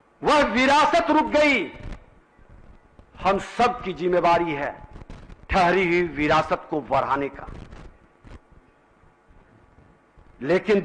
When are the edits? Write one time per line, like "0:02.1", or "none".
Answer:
none